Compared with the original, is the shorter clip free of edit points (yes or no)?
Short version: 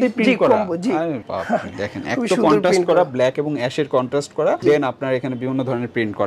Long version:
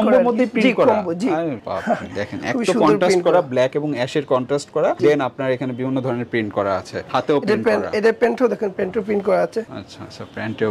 yes